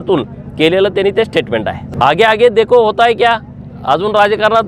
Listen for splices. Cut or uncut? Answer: cut